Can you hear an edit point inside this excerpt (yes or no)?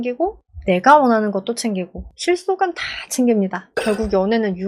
yes